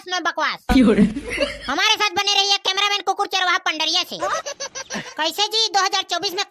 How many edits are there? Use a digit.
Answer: 1